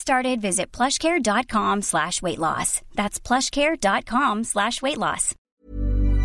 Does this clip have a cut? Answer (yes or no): yes